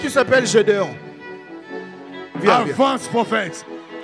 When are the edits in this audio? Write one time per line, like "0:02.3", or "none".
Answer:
none